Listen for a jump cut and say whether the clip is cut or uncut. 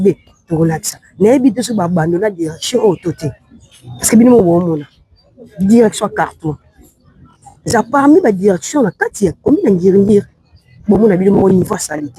uncut